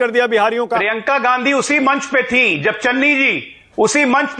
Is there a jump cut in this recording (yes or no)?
no